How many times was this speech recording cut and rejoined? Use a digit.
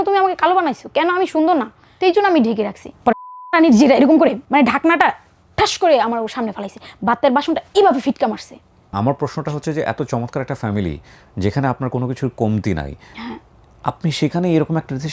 2